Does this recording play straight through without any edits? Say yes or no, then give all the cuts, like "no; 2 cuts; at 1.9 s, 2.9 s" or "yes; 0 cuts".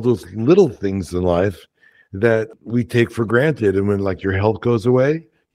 no; 1 cut; at 2.5 s